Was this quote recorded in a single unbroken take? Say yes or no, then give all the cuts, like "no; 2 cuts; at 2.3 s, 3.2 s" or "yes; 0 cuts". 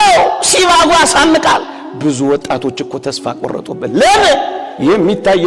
yes; 0 cuts